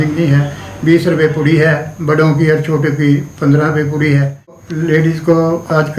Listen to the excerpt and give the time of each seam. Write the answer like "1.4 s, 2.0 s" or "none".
4.6 s

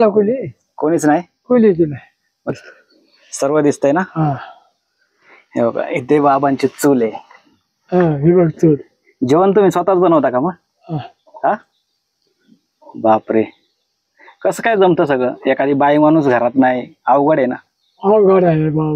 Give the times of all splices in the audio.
2.5 s

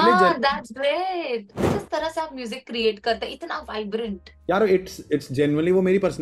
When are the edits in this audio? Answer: 1.8 s, 4.3 s

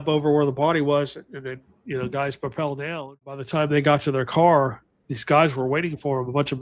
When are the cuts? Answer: 3.4 s

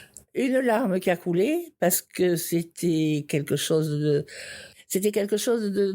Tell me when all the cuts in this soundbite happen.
4.7 s

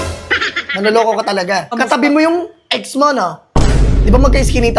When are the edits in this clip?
1.7 s

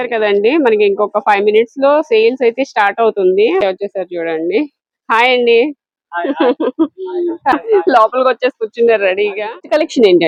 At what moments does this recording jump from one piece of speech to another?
none

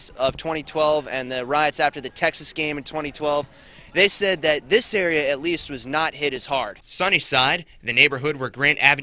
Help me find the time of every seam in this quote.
none

